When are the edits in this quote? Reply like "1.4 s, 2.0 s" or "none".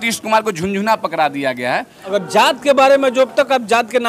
2.0 s